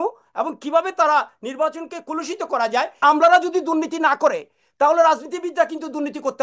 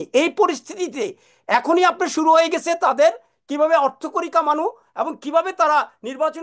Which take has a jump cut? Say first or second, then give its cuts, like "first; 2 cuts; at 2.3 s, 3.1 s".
first; 1 cut; at 3.0 s